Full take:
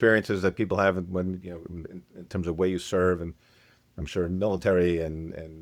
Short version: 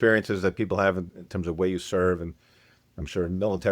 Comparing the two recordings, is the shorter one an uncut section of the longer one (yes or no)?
no